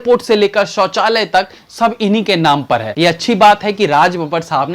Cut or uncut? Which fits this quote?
cut